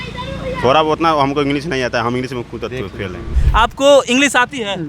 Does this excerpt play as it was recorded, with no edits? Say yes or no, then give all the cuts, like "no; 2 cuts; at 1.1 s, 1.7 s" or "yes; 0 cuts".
no; 1 cut; at 3.3 s